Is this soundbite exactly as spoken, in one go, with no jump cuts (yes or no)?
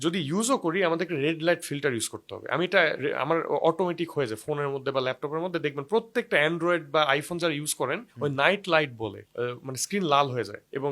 yes